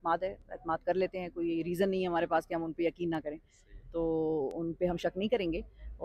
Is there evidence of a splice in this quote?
no; 0 cuts

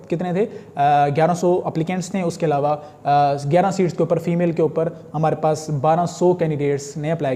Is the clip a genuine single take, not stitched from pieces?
yes; 0 cuts

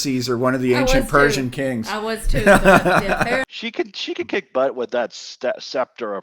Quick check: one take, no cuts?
no; 1 cut; at 3.4 s

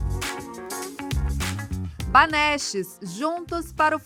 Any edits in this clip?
no; 0 cuts

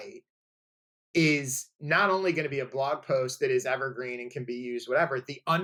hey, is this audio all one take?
yes; 0 cuts

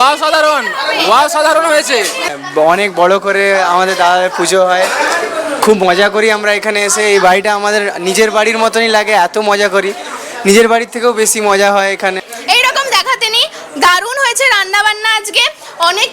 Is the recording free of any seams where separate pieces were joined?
no; 2 cuts; at 2.3 s, 12.3 s

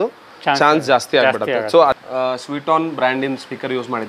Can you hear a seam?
yes; 1 cut; at 1.9 s

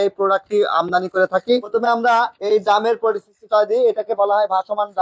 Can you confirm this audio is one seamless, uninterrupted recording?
no; 1 cut; at 1.7 s

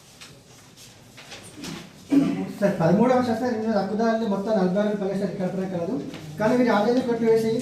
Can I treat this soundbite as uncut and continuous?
yes; 0 cuts

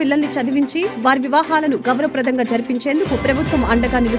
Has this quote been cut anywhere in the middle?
no; 0 cuts

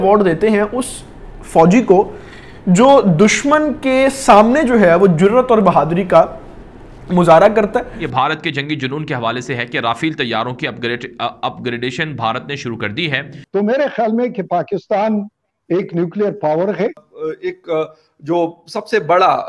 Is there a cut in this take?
yes; 3 cuts; at 8.0 s, 13.3 s, 17.1 s

